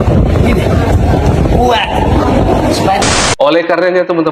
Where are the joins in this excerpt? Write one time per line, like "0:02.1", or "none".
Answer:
0:03.0

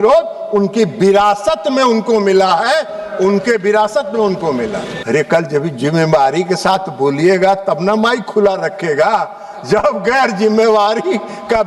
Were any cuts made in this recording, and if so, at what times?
0:04.9

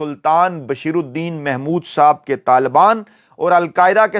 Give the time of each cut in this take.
none

